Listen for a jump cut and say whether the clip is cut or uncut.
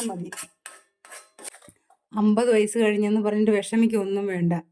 cut